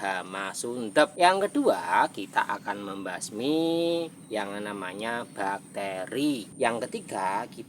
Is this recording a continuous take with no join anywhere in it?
no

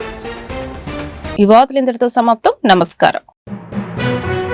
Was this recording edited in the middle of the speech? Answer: no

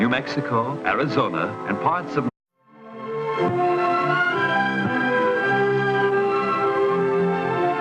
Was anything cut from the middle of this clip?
no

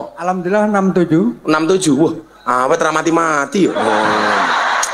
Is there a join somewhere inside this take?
no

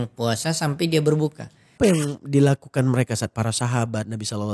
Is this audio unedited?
no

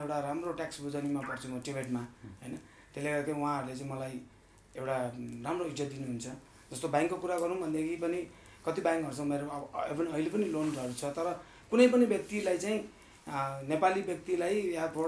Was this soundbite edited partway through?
no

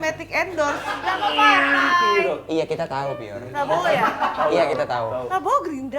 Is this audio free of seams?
no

